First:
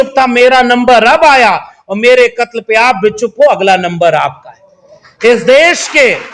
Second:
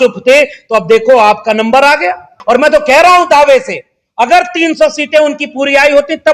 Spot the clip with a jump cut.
second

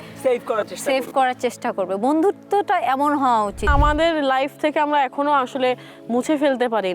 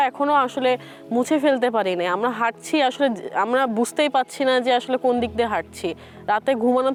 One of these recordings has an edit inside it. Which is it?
first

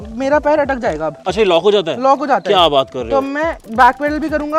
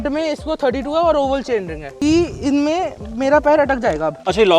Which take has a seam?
second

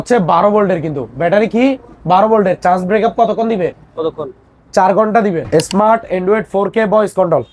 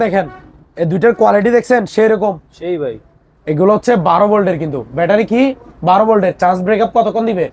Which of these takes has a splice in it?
first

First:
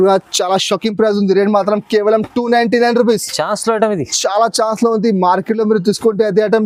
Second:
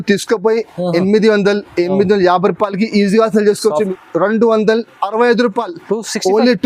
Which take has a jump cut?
second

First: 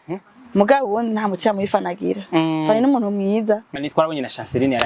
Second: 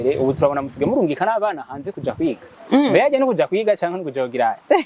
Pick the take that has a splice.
first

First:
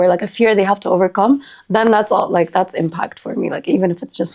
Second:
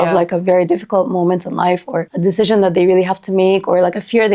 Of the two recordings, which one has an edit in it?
second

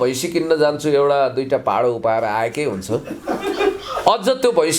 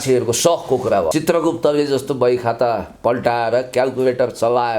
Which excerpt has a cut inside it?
second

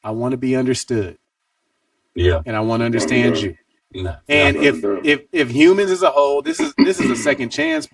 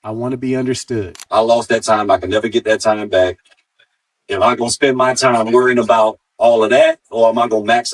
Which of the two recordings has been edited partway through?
second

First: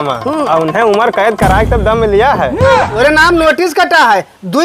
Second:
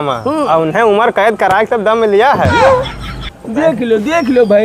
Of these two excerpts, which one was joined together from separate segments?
first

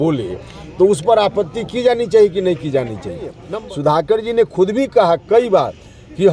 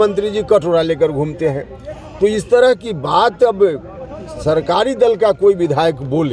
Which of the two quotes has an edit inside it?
first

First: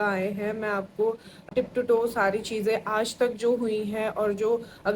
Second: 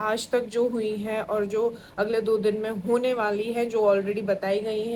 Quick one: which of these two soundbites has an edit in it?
first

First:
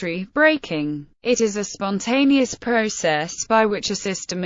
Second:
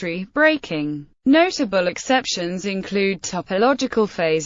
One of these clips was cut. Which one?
second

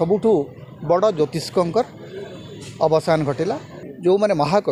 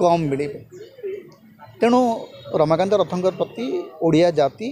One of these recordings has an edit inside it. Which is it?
first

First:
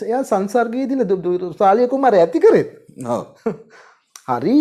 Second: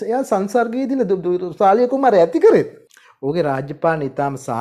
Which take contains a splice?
second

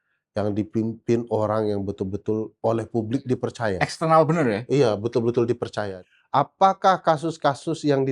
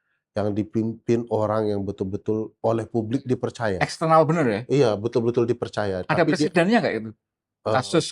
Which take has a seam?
first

